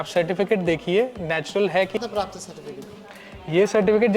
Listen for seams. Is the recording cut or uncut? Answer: cut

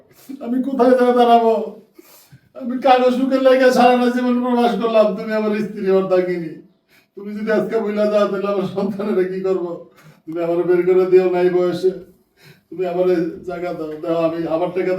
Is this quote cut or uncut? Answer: uncut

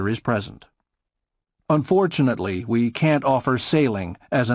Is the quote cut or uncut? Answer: uncut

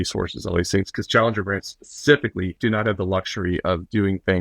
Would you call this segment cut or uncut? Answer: cut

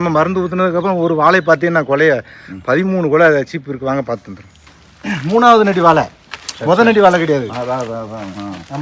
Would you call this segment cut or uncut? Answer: uncut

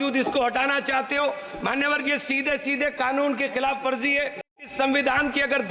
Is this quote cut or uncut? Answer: cut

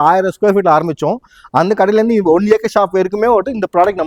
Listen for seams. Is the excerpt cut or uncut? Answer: uncut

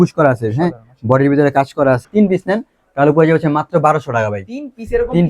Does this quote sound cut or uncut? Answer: cut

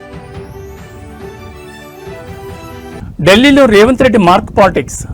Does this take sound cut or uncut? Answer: cut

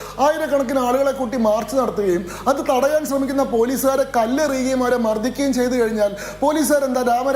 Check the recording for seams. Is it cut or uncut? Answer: uncut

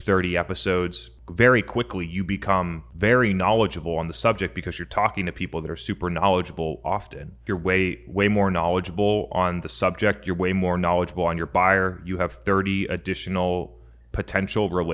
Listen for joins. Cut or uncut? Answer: cut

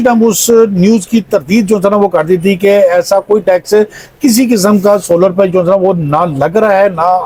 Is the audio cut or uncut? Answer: uncut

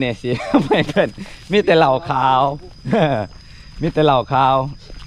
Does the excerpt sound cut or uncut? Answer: uncut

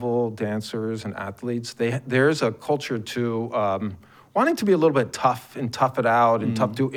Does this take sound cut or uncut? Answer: uncut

